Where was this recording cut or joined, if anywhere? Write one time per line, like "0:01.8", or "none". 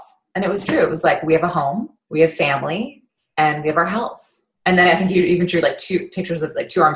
0:01.9